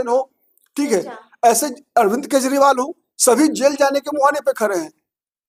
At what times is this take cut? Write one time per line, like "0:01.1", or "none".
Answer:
none